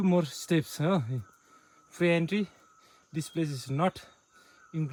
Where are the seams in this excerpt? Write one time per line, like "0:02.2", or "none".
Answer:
none